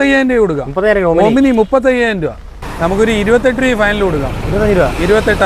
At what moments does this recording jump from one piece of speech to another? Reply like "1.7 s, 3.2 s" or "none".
2.6 s